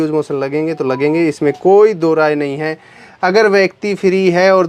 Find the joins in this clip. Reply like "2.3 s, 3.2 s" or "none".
none